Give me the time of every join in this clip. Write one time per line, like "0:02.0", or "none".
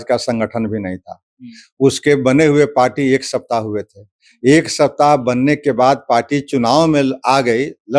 none